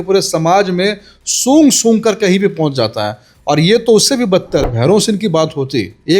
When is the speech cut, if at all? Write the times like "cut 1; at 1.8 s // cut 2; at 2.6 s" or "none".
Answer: cut 1; at 4.7 s